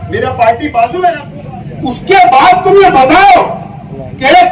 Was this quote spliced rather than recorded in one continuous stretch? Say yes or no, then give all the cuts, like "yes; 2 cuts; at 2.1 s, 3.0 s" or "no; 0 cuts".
yes; 1 cut; at 1.3 s